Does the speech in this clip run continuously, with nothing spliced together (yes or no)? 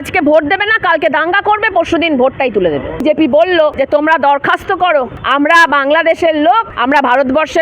no